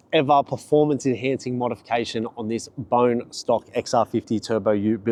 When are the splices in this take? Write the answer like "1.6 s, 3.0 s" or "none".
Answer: none